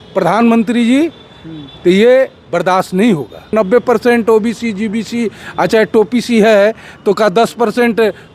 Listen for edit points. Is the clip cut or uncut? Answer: cut